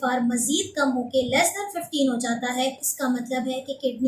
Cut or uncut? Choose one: cut